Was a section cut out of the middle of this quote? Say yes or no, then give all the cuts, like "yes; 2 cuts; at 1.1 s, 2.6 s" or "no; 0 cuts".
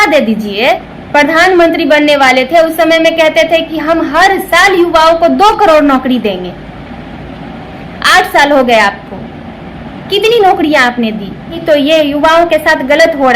yes; 2 cuts; at 0.9 s, 11.6 s